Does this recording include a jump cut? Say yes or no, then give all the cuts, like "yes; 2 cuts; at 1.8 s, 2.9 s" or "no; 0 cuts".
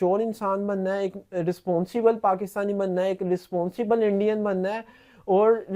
no; 0 cuts